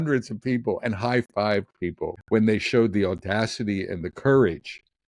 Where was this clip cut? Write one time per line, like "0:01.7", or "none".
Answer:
0:02.1